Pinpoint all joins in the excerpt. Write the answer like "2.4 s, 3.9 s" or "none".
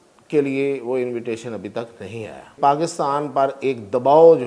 2.6 s